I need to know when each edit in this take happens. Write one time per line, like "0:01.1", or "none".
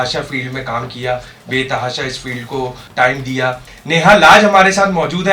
0:02.9
0:03.7